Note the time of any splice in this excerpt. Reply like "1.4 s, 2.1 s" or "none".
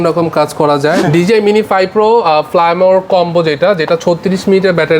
1.0 s